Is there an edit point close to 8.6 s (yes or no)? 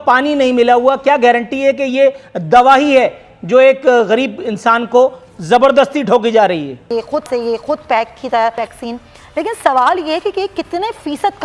yes